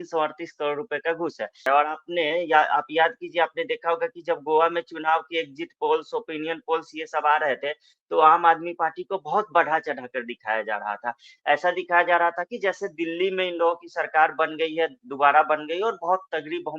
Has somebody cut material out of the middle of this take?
yes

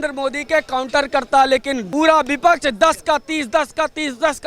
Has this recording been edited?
yes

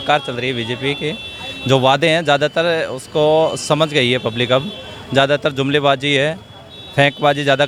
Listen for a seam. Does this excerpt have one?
no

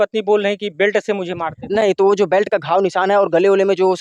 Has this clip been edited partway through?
no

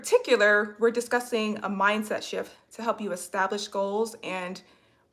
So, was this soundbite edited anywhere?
no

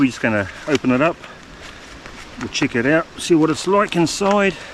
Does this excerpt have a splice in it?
no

